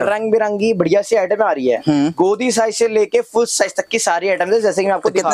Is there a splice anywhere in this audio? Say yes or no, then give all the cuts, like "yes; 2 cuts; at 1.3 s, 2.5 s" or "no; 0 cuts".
no; 0 cuts